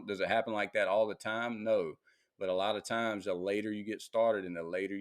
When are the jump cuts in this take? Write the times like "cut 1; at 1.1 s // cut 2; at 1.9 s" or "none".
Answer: none